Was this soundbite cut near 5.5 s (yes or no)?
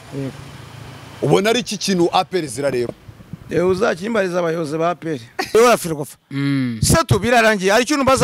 yes